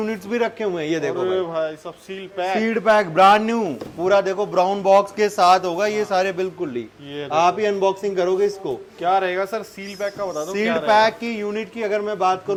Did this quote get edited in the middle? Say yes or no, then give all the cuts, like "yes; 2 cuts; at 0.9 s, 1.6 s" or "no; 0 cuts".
no; 0 cuts